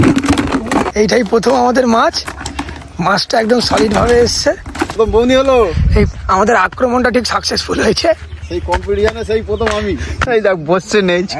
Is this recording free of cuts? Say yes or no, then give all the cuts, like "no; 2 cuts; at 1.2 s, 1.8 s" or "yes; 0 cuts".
no; 4 cuts; at 0.9 s, 4.9 s, 6.1 s, 10.2 s